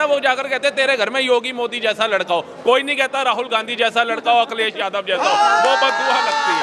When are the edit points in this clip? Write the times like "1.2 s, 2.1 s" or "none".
none

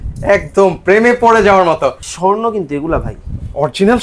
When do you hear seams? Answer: 2.1 s

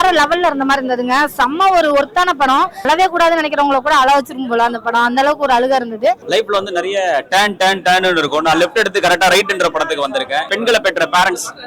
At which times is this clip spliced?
2.8 s, 6.2 s, 10.5 s

